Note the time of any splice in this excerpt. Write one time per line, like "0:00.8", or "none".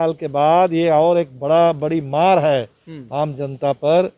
none